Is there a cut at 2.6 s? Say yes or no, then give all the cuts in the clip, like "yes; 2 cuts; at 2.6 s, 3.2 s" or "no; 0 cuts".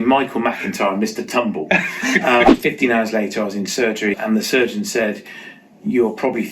yes; 2 cuts; at 2.6 s, 4.2 s